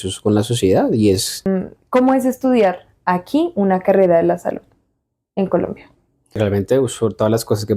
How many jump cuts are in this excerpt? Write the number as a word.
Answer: two